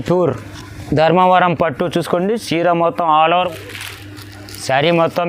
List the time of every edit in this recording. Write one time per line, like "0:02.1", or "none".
0:03.5

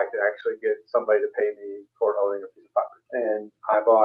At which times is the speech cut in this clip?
0:03.0

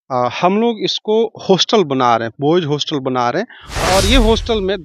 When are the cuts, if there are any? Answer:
0:03.6

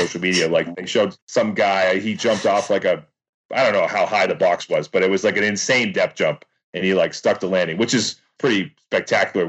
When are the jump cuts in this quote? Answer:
0:01.1
0:03.4
0:08.2

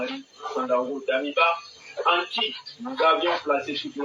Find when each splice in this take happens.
0:01.4

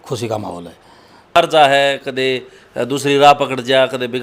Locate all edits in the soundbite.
0:01.4

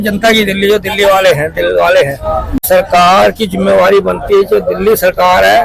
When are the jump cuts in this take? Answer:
0:02.7

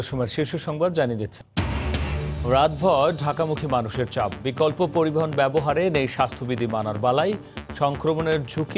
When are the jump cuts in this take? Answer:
0:01.3

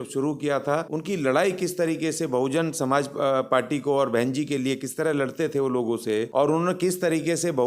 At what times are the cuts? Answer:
0:00.9
0:06.3

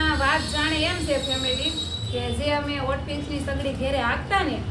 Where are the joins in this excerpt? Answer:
none

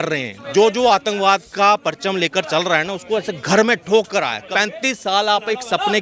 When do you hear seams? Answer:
0:04.5

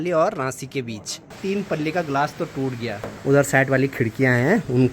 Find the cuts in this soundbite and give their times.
0:01.4
0:03.0

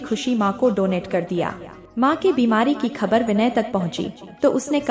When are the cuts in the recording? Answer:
none

